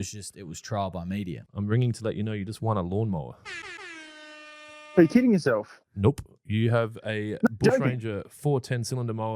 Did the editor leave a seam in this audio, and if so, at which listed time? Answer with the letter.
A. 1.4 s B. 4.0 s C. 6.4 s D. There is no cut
A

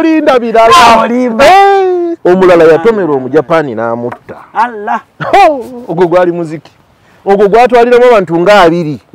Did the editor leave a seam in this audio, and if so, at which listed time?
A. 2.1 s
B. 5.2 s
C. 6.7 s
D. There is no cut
A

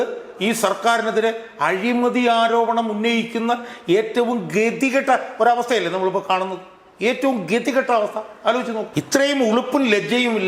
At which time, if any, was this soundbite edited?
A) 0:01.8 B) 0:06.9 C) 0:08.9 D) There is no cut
C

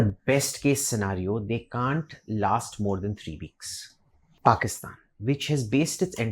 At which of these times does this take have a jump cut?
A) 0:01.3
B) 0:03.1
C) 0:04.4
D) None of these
C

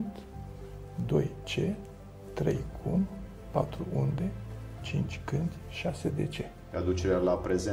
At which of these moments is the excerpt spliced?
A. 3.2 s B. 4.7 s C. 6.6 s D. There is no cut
C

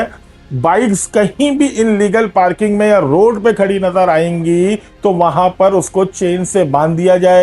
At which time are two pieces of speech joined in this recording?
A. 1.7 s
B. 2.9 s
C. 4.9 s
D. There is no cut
D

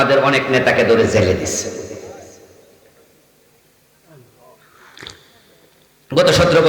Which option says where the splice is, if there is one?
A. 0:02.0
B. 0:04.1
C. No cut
C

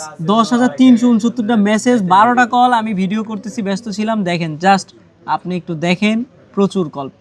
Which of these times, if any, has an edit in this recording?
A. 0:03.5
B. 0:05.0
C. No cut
C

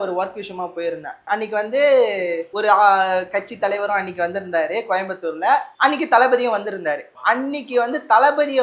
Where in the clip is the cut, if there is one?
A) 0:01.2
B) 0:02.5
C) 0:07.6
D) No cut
A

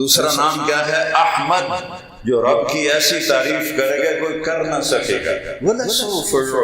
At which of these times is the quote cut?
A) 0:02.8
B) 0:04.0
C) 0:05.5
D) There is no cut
C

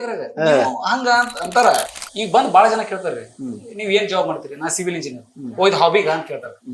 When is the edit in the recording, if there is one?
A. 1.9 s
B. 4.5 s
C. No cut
A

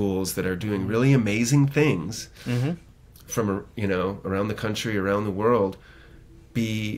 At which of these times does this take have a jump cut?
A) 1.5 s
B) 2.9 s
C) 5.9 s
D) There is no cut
B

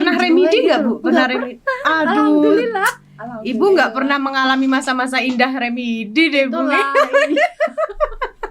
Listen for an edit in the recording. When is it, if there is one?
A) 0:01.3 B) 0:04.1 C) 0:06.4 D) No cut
D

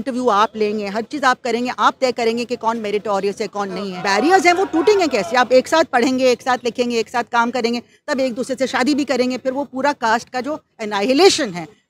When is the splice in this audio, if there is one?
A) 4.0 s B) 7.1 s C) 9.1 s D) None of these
A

